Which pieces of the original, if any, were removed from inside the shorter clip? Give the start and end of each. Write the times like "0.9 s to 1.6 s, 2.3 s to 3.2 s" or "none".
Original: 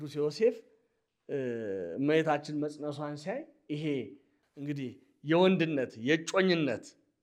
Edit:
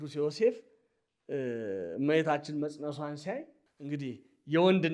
3.5 s to 4.3 s

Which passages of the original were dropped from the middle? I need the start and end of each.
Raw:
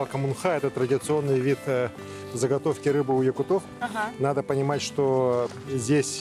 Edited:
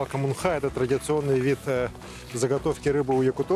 none

